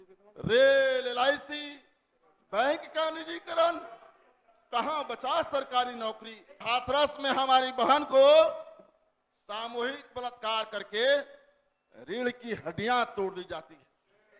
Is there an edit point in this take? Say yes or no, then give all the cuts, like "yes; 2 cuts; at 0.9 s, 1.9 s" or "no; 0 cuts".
yes; 1 cut; at 6.6 s